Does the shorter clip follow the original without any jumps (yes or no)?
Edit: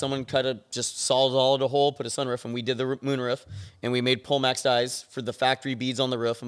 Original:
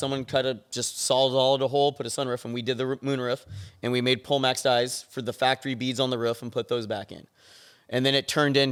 yes